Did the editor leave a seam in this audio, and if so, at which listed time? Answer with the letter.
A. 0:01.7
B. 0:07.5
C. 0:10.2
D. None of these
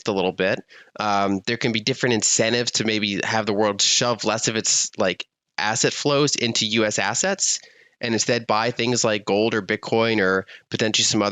D